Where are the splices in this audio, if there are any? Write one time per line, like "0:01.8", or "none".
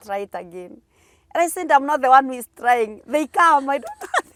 none